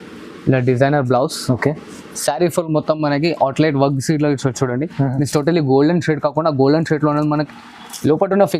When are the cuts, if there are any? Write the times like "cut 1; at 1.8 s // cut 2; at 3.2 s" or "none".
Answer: none